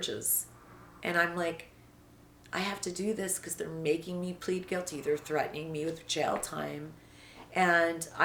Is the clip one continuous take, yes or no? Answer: yes